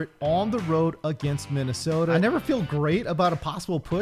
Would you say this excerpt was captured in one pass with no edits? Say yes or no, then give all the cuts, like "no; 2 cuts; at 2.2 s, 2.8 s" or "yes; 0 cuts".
no; 1 cut; at 2.2 s